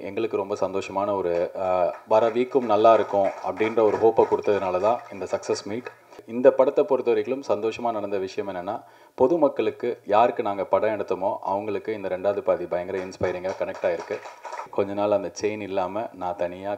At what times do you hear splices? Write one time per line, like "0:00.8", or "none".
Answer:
0:06.2
0:14.7